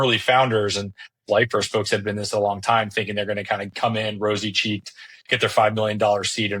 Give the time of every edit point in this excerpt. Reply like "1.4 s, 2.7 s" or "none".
1.1 s